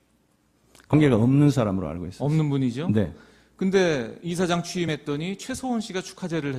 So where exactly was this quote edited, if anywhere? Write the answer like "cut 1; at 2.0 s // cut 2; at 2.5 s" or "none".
none